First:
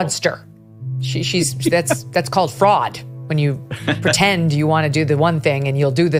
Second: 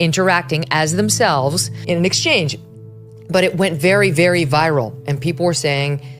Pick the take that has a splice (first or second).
second